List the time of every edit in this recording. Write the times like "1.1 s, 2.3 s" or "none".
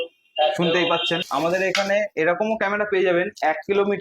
1.3 s